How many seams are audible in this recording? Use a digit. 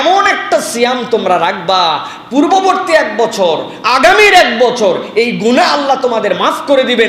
0